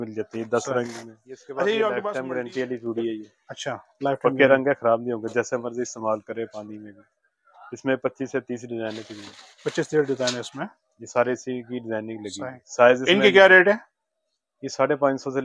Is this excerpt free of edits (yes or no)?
no